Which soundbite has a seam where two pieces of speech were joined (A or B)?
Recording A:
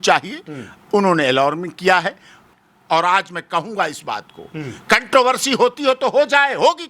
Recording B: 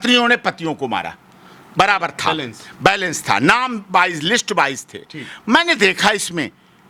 A